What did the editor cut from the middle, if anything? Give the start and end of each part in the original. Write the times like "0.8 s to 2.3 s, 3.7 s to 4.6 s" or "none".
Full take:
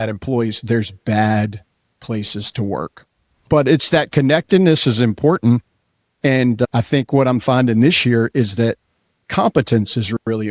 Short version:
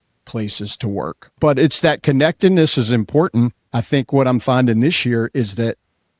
3.0 s to 3.3 s, 5.9 s to 6.8 s